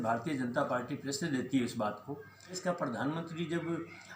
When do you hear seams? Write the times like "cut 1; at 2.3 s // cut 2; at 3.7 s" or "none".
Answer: cut 1; at 2.6 s

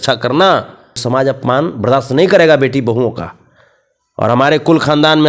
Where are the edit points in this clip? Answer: cut 1; at 1.0 s

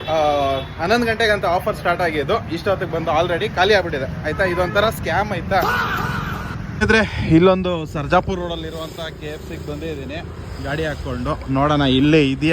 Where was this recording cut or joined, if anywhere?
cut 1; at 6.6 s

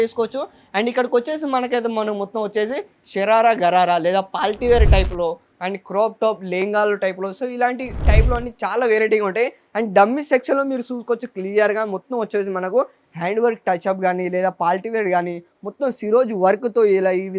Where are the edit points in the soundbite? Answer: none

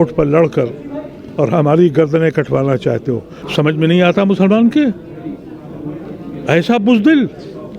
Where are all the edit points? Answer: cut 1; at 3.3 s

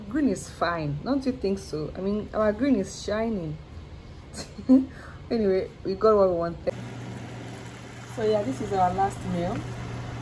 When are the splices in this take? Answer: cut 1; at 6.7 s

